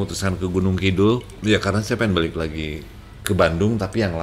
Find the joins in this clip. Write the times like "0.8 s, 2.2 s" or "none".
1.3 s